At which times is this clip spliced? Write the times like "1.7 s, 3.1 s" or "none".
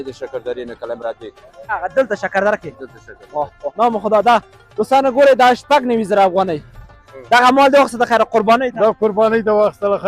1.7 s, 3.7 s, 7.1 s

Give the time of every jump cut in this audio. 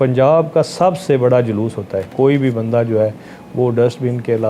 2.1 s

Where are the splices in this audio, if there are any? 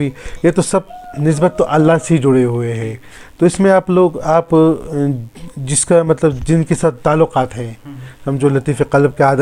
none

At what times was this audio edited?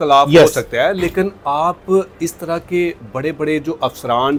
none

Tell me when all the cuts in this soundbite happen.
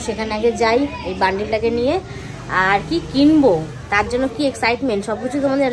none

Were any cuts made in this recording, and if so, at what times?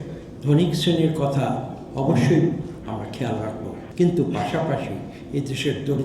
3.8 s

